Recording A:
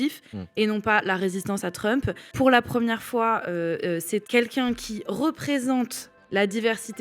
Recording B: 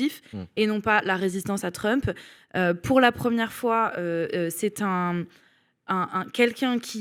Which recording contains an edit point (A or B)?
A